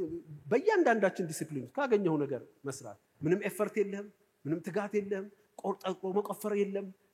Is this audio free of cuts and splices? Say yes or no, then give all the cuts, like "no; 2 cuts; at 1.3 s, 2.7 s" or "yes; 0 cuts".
yes; 0 cuts